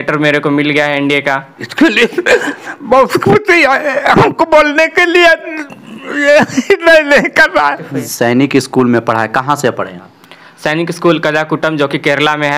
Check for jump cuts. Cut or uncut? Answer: cut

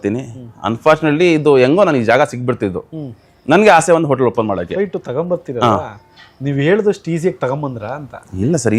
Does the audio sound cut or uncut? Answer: uncut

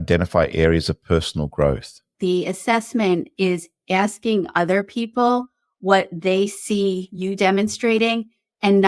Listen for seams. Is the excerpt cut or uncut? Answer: cut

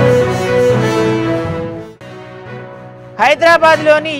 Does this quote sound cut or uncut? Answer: uncut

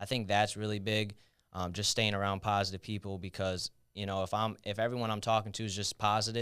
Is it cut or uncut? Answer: uncut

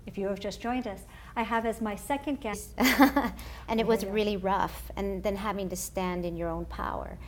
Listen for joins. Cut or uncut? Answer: uncut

